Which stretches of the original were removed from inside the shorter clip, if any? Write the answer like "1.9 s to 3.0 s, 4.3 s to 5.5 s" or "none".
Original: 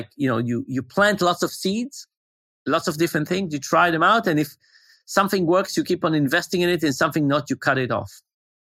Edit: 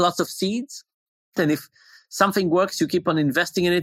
2.7 s to 4.4 s